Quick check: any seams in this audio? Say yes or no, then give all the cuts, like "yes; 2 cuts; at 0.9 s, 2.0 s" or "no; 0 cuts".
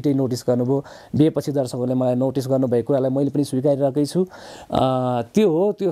no; 0 cuts